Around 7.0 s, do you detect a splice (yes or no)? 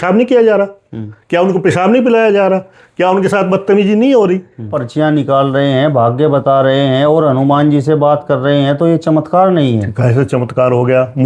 no